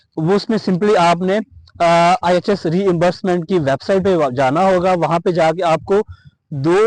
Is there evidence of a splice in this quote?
no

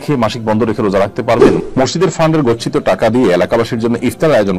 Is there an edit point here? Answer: yes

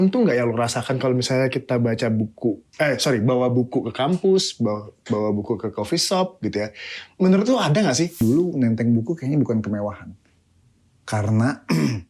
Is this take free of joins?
no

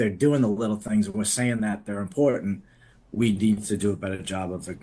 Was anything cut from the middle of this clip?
no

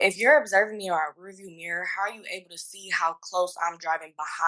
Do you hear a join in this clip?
no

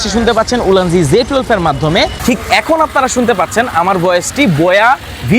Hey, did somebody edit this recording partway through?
yes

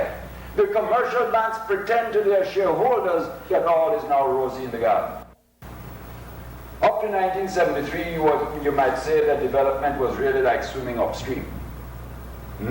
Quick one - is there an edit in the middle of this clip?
yes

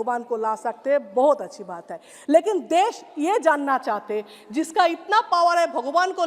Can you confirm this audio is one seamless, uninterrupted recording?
yes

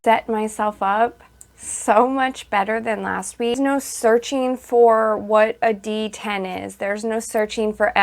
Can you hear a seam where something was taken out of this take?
yes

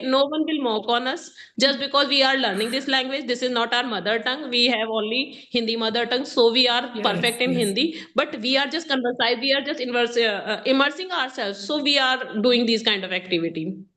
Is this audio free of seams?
yes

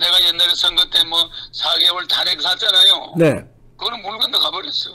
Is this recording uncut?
yes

